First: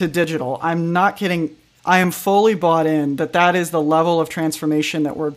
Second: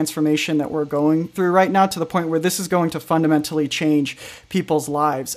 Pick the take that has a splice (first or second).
first